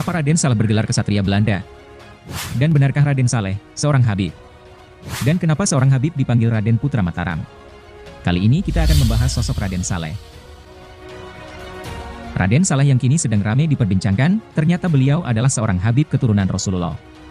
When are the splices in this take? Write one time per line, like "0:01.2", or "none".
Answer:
none